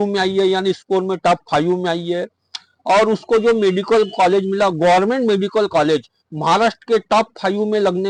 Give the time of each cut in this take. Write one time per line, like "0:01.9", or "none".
none